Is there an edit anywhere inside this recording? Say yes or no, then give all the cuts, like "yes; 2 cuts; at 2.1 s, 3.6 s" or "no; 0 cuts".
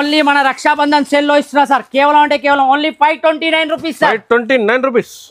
no; 0 cuts